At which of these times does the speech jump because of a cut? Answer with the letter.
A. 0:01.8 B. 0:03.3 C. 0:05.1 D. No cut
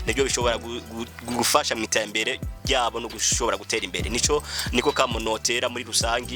D